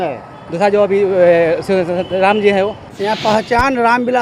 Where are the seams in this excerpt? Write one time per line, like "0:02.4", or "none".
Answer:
0:02.9